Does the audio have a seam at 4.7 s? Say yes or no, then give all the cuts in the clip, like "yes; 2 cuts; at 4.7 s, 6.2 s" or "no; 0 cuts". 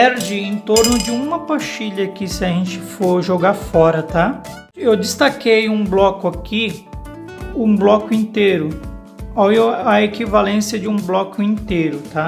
yes; 1 cut; at 4.7 s